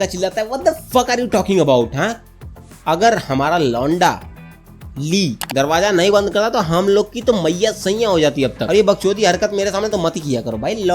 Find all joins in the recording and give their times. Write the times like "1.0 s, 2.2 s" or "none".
none